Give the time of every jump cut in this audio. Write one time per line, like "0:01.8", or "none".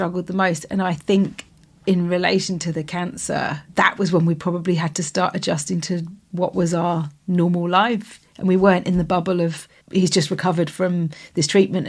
0:03.7
0:09.8